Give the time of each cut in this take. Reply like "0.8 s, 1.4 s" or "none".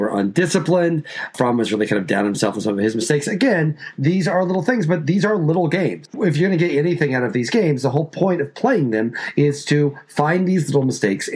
1.3 s, 6.1 s

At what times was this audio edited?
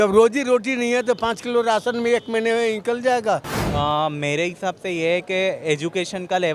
3.6 s

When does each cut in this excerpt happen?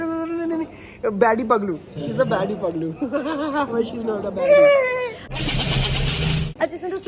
none

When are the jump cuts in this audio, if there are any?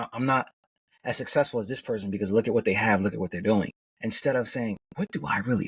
3.8 s

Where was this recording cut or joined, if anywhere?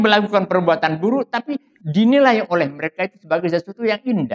none

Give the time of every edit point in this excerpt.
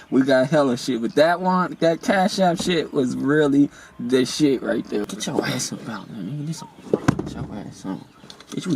5.1 s

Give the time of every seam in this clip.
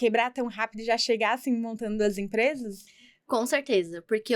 none

